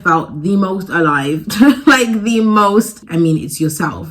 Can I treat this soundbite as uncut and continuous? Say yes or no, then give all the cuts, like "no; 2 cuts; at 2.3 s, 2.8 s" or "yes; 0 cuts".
no; 1 cut; at 3.0 s